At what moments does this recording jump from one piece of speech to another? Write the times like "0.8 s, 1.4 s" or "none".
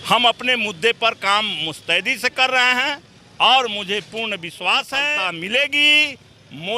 5.1 s